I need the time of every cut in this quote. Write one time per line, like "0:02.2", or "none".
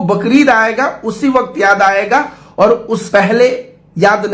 0:03.0